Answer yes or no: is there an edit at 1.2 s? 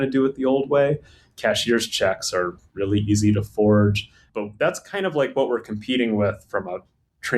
no